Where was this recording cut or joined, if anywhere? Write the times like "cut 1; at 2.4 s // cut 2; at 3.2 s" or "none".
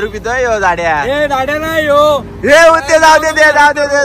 none